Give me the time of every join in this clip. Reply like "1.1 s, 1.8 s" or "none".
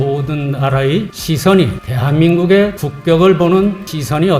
none